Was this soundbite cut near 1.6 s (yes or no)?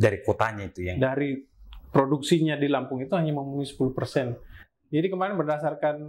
no